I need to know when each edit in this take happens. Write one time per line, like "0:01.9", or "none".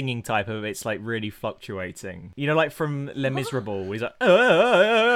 0:02.2